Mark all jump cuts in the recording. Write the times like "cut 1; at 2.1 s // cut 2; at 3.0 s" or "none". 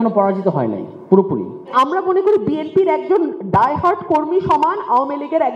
cut 1; at 1.7 s